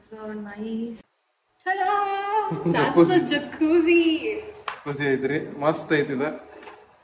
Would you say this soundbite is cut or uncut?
cut